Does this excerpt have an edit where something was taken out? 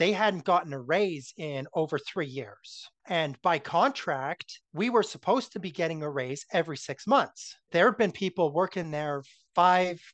no; 0 cuts

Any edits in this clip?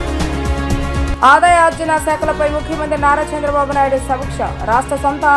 yes; 1 cut; at 1.1 s

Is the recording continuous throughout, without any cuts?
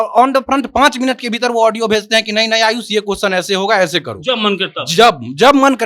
yes; 0 cuts

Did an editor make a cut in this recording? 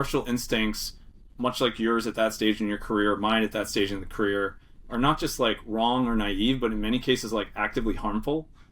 no; 0 cuts

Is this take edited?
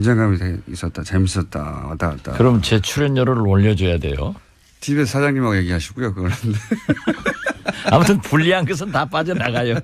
yes; 1 cut; at 7.9 s

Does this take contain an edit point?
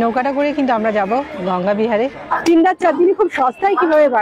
yes; 1 cut; at 2.3 s

